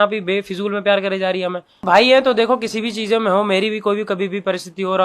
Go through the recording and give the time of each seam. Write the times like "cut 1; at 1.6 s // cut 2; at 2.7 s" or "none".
cut 1; at 1.8 s